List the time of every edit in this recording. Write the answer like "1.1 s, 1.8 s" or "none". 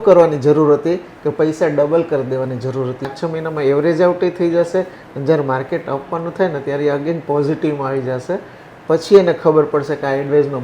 3.0 s